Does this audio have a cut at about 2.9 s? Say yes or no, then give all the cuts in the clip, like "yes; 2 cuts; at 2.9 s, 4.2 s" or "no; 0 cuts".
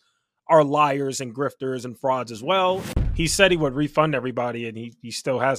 yes; 1 cut; at 2.9 s